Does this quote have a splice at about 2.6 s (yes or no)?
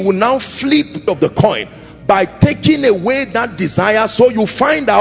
no